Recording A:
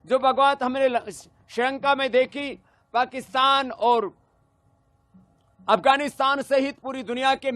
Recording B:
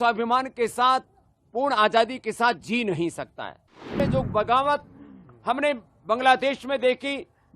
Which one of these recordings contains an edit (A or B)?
B